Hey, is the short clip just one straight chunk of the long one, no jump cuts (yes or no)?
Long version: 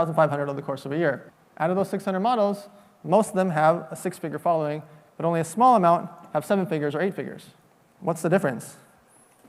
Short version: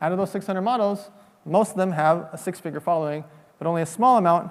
yes